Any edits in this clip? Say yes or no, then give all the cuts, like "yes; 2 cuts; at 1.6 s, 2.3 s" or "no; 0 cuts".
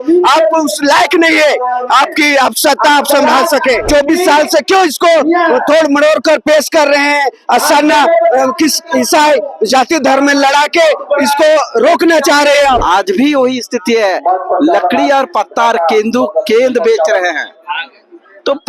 yes; 2 cuts; at 3.9 s, 12.8 s